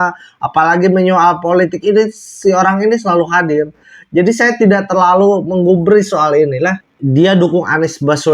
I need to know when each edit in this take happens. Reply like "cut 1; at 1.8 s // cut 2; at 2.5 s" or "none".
cut 1; at 6.8 s